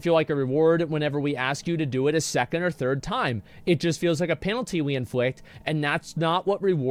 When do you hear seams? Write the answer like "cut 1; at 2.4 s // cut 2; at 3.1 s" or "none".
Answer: none